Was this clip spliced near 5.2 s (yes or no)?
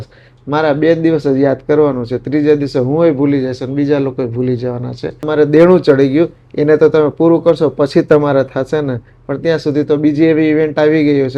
yes